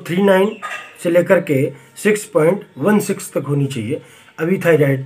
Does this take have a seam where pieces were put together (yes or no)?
no